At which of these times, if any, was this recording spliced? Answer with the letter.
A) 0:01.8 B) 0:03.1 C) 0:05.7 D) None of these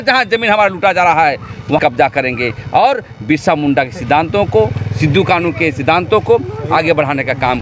A